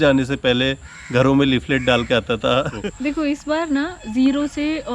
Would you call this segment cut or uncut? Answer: cut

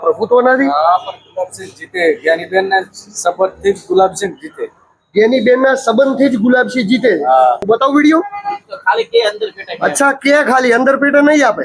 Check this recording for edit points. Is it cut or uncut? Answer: cut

